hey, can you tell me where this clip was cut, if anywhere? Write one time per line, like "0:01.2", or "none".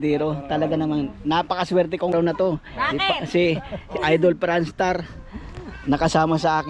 0:02.1